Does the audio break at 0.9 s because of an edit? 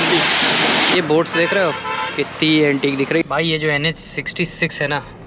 yes; 2 cuts; at 0.9 s, 3.2 s

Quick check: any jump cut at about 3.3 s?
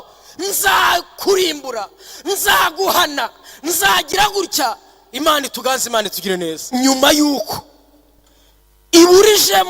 no; 1 cut; at 6.6 s

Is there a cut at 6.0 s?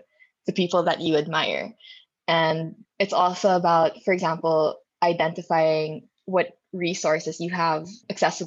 no; 0 cuts

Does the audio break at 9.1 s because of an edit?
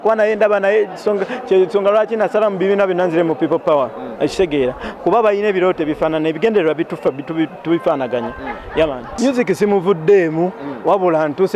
yes; 1 cut; at 9.1 s

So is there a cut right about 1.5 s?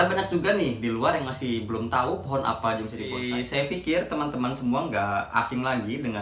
no; 1 cut; at 3.2 s

